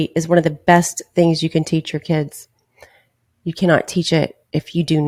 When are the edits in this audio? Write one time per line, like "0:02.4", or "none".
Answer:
none